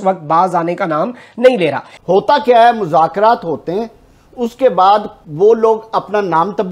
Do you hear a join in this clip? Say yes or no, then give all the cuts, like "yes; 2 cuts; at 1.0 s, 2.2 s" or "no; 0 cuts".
yes; 1 cut; at 1.9 s